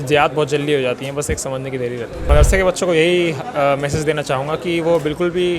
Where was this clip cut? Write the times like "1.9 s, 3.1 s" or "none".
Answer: 2.3 s